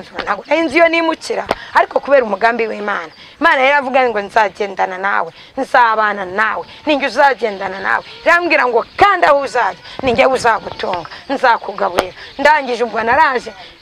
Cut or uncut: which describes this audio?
uncut